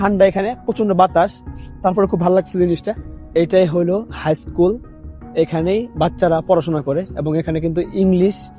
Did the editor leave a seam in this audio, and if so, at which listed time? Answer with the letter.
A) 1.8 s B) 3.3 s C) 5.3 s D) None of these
D